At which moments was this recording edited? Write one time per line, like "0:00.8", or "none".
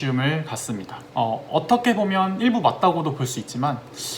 0:01.0